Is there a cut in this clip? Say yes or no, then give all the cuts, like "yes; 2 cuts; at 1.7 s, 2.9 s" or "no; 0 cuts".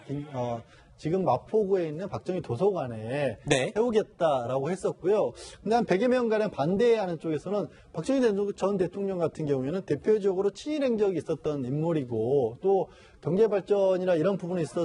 yes; 1 cut; at 11.4 s